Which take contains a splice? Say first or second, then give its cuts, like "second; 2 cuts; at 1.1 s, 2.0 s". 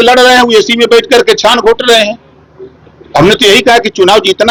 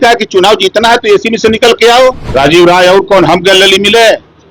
second; 1 cut; at 2.2 s